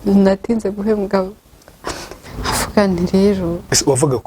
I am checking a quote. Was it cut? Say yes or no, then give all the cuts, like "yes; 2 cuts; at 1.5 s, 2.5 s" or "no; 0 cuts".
yes; 1 cut; at 2.1 s